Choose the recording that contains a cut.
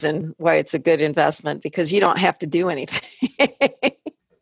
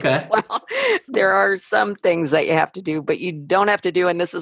second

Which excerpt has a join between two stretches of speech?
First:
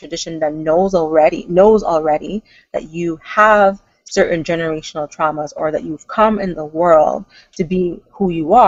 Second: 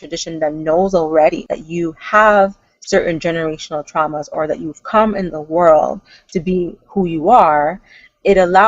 second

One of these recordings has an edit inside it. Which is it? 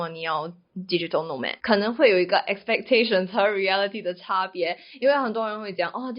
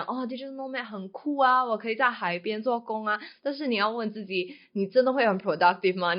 first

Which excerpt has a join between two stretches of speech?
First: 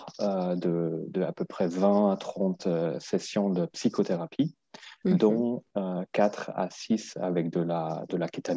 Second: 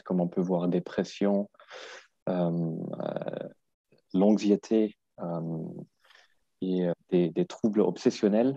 second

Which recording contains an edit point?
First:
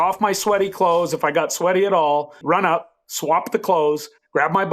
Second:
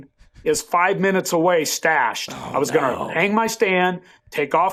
first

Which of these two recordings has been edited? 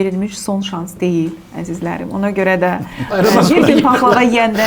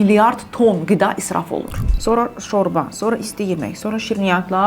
second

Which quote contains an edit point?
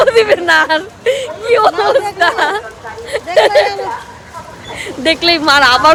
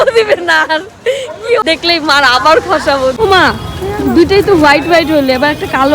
second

